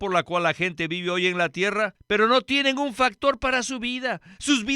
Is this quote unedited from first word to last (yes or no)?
no